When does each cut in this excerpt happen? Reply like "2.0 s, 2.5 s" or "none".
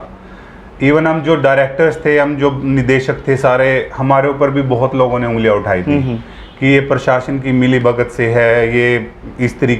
none